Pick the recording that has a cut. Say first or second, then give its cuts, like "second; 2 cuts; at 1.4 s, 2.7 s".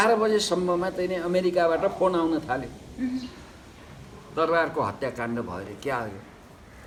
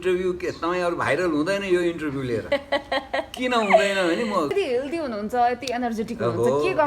second; 1 cut; at 4.5 s